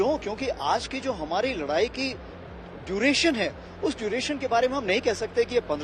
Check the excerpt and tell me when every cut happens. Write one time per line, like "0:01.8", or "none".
none